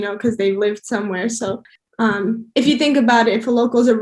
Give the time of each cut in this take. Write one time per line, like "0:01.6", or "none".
0:01.7